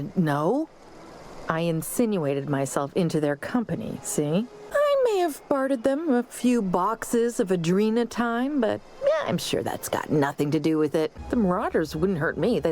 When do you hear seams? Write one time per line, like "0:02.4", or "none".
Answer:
0:04.6
0:11.2